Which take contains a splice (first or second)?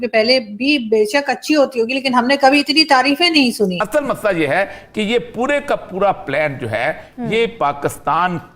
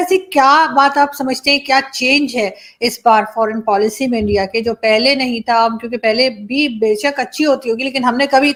first